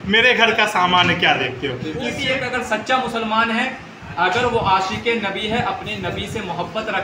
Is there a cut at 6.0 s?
no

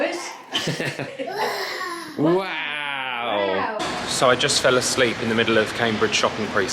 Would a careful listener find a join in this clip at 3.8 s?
yes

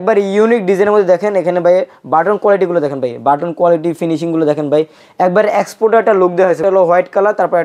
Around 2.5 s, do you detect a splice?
no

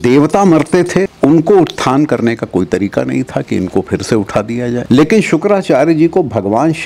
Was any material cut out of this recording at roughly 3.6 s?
no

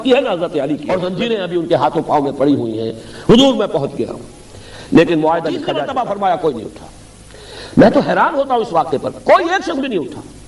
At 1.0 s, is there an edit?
yes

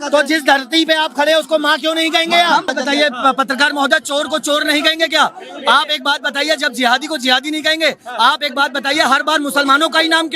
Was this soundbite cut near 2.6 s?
yes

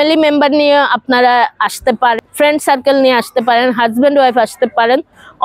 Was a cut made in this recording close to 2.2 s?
yes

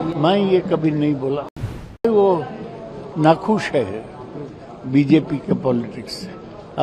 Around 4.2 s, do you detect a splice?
no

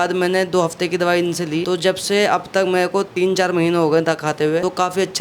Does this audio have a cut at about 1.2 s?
no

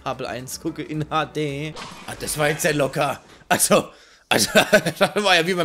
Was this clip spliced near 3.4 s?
no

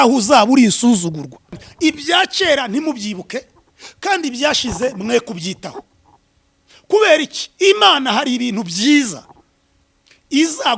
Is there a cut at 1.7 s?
yes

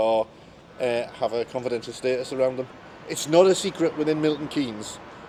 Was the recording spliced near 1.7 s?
no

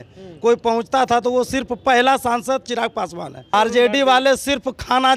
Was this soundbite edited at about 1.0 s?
no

